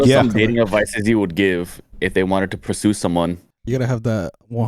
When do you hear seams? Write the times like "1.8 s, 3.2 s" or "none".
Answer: 2.6 s, 3.6 s